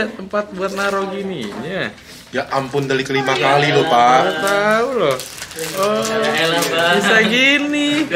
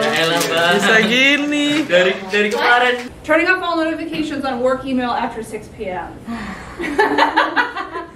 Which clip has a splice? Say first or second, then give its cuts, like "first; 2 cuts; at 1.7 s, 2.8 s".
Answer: second; 1 cut; at 3.1 s